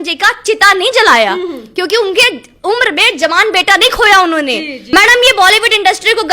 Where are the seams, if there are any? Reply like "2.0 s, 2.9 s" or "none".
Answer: 4.9 s